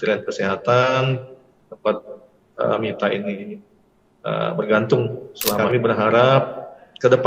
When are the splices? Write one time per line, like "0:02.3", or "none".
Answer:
0:05.6